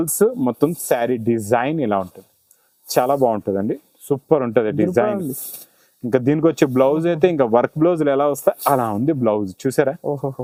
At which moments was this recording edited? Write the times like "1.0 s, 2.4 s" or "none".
none

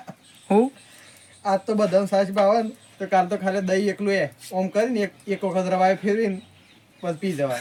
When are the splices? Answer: none

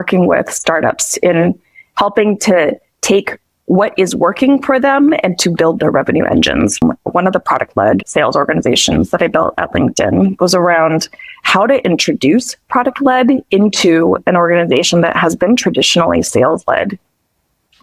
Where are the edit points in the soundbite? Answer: 6.8 s

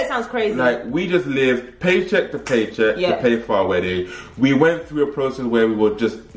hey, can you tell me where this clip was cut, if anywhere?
none

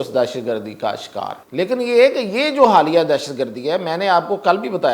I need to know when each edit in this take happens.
1.4 s

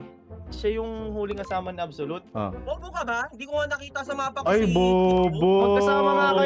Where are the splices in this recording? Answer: 2.2 s

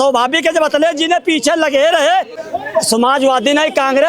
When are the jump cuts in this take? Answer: 2.3 s

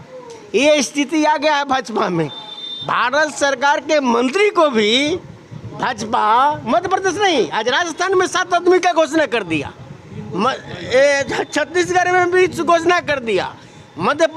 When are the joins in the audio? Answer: none

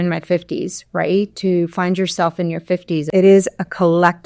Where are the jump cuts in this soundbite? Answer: 3.1 s

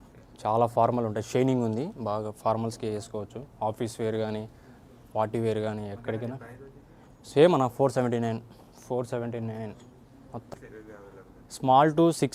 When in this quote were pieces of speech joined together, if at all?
10.5 s

